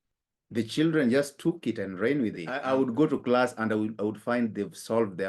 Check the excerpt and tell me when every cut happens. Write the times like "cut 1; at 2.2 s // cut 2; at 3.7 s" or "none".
cut 1; at 2.5 s